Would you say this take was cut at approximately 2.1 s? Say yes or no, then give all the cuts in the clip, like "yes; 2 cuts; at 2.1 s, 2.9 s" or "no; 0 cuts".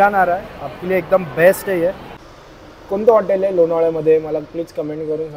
yes; 1 cut; at 2.1 s